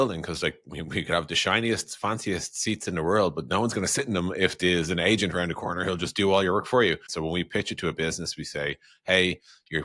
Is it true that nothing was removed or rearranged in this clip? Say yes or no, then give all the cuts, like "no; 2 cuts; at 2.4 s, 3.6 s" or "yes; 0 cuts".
no; 1 cut; at 7.1 s